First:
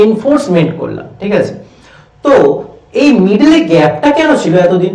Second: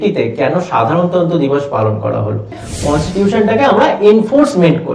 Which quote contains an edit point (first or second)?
second